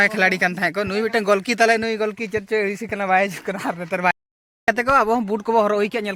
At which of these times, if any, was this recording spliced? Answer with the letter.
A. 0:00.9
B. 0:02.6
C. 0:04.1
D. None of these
C